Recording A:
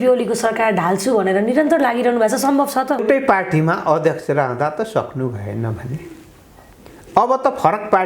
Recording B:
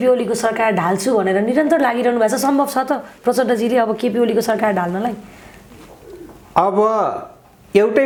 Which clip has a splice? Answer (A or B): A